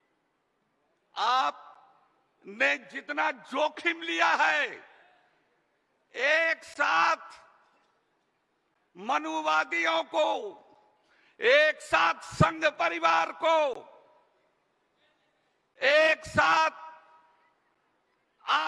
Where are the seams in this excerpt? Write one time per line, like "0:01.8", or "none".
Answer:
none

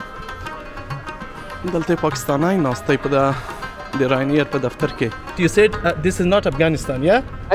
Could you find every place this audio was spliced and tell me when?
0:05.3

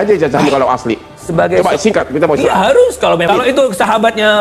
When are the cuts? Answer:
0:03.3

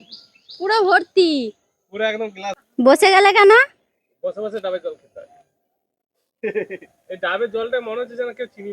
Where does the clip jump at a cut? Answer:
0:02.6

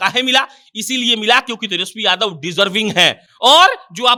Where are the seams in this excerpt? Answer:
none

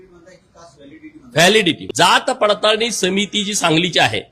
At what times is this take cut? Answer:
0:01.8

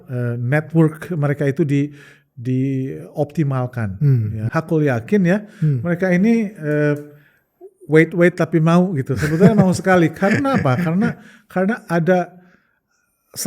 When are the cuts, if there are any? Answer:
0:04.5

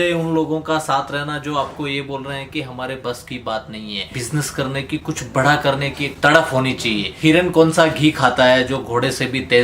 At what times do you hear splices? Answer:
0:04.2
0:07.1

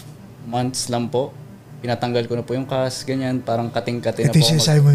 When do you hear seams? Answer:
none

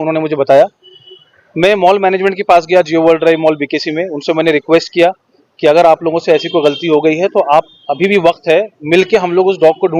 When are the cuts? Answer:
none

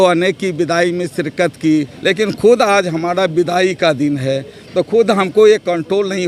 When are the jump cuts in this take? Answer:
0:01.9

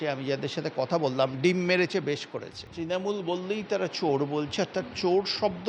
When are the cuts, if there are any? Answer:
0:02.6

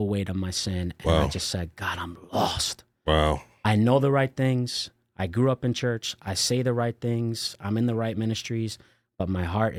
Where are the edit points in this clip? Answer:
none

